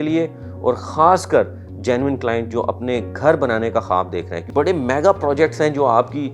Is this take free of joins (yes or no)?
no